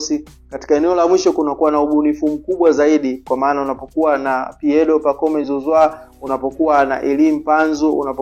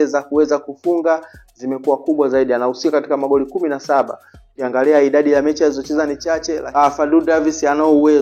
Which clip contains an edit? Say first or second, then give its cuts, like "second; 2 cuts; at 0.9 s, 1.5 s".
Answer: second; 1 cut; at 6.6 s